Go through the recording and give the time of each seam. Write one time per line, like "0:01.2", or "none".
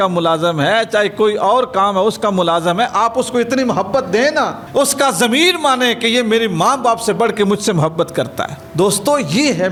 none